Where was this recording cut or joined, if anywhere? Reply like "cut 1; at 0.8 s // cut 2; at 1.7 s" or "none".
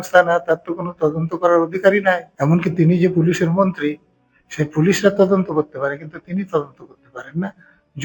cut 1; at 2.3 s